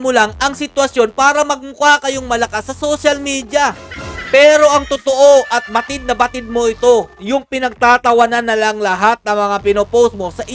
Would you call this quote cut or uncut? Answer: uncut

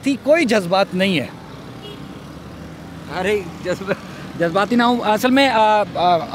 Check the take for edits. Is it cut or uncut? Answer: uncut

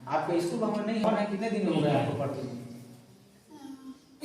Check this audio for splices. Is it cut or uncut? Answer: cut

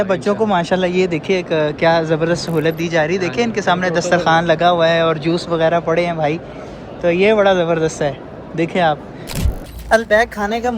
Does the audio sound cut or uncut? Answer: cut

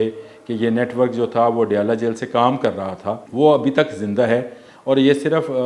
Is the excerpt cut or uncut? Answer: cut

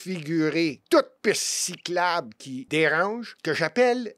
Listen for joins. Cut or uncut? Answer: cut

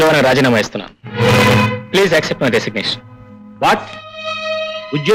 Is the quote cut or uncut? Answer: uncut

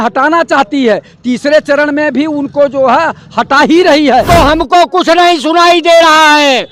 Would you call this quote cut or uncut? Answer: cut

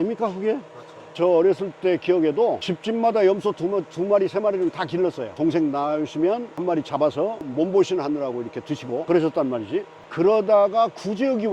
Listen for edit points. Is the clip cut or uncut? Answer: uncut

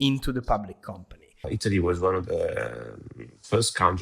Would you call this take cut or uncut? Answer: cut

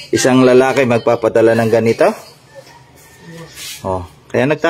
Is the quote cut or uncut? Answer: uncut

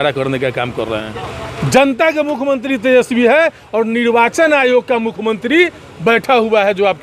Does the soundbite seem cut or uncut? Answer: cut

